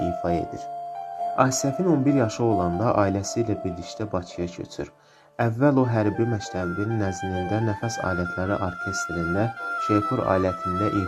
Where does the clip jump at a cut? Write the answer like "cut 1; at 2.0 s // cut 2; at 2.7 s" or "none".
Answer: cut 1; at 9.6 s